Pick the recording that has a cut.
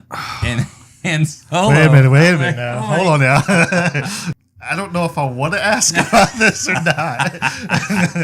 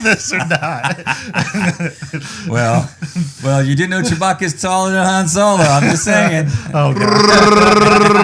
first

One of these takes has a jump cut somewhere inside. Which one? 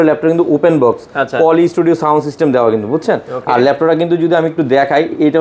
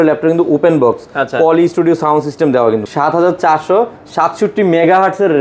second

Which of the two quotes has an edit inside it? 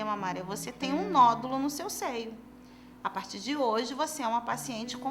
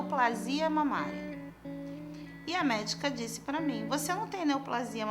second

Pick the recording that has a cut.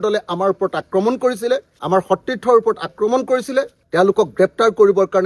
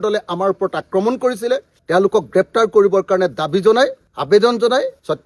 second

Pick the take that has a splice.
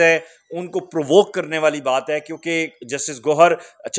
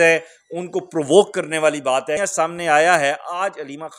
second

